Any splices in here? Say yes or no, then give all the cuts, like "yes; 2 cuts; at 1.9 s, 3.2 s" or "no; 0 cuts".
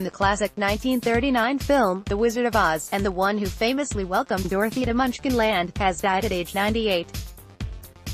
yes; 1 cut; at 7.1 s